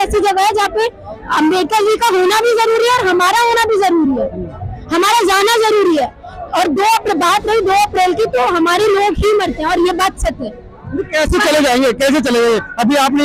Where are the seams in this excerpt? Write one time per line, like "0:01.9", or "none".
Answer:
none